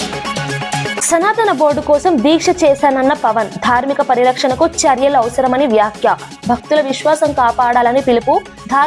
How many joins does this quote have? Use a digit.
1